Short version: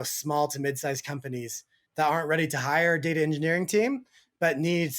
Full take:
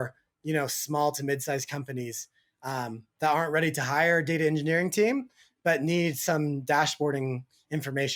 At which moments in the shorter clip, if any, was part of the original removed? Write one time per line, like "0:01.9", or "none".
0:01.8